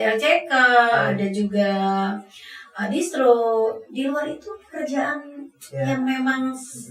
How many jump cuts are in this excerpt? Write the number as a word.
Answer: zero